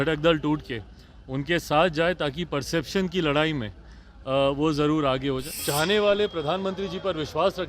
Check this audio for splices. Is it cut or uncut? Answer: cut